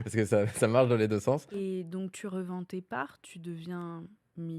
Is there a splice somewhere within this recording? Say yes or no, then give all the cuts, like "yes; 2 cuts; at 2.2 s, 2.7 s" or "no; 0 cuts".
yes; 1 cut; at 1.5 s